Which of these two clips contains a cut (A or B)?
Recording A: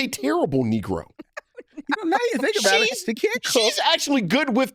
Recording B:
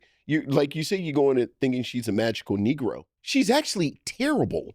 B